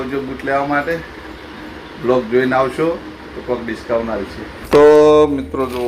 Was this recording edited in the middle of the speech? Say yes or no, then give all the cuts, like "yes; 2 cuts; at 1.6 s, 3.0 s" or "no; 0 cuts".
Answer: yes; 1 cut; at 4.5 s